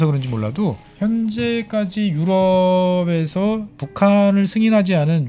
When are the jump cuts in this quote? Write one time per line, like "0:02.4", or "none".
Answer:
0:00.9
0:03.8